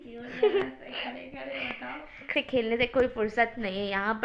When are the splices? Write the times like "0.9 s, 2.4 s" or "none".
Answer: 2.3 s